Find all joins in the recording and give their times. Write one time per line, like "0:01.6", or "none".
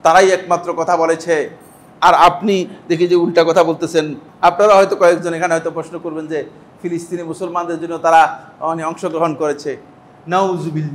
0:04.2